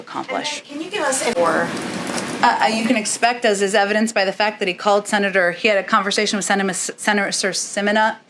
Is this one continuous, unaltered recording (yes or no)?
no